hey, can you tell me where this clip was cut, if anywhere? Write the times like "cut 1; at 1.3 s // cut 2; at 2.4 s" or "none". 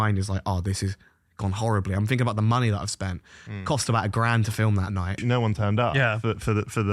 cut 1; at 5.2 s